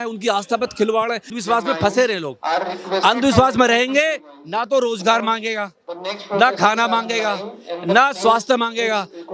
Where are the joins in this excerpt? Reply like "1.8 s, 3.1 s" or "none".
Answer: 1.3 s